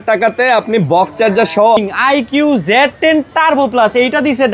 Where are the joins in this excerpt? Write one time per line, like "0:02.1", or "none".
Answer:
0:01.8